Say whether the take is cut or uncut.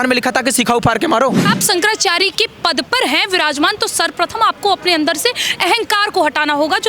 cut